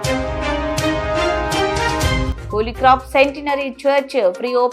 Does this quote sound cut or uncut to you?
cut